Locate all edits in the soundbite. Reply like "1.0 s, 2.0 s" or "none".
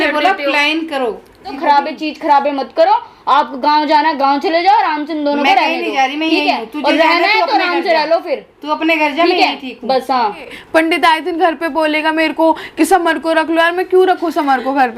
1.5 s, 10.6 s